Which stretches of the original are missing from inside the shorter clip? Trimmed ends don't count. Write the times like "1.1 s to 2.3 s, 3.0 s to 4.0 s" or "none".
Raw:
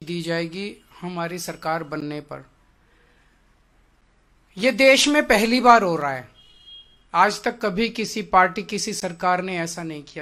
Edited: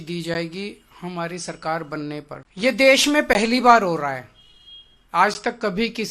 2.4 s to 4.4 s